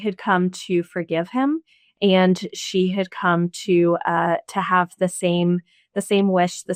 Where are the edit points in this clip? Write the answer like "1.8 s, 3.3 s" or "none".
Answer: none